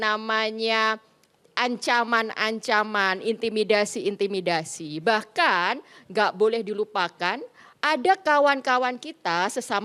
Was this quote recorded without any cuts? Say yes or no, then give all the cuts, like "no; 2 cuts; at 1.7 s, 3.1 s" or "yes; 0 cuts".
yes; 0 cuts